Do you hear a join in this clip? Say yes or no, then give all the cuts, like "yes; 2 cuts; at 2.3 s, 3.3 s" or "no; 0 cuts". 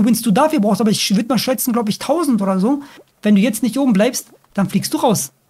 yes; 1 cut; at 2.9 s